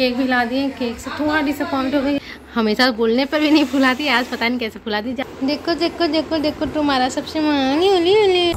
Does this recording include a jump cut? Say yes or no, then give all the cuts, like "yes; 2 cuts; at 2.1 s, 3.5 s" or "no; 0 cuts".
yes; 2 cuts; at 2.2 s, 5.2 s